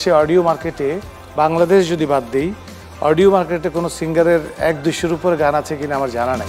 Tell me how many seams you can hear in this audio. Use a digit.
0